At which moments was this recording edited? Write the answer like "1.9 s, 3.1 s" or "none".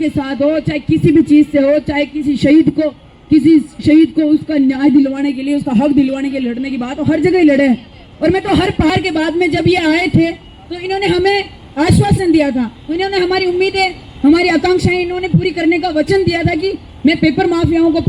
8.9 s